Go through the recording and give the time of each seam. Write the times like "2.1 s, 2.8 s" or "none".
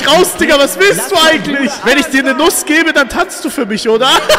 1.8 s